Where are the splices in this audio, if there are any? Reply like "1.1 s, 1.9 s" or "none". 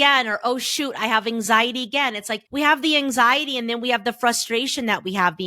2.4 s